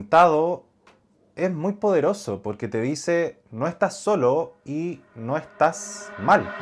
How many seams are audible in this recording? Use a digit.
0